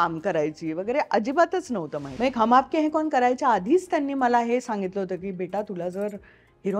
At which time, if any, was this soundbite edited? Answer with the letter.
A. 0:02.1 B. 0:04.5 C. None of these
A